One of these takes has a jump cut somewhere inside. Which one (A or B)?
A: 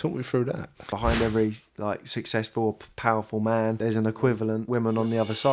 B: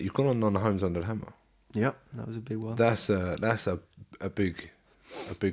A